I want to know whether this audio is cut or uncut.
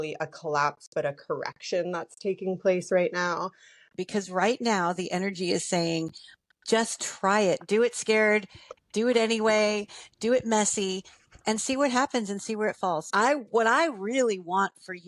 cut